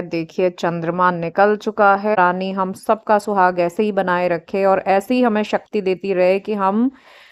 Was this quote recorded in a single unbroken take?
no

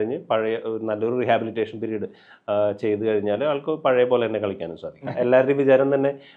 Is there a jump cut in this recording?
yes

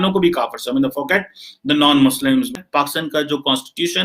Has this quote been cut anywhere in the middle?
yes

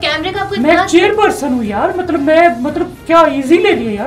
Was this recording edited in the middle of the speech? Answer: no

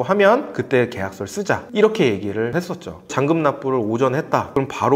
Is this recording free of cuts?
yes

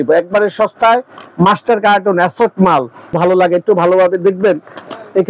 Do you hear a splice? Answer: yes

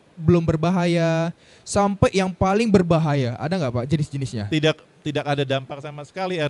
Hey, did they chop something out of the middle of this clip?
yes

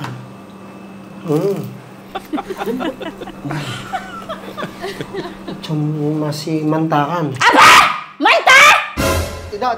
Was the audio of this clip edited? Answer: no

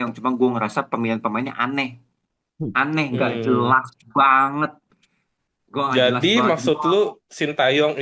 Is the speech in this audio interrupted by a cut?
no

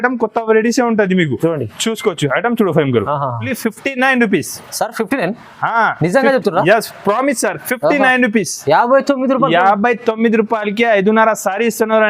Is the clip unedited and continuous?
no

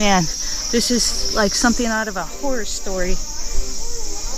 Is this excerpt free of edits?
yes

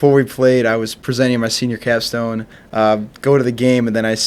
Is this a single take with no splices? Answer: no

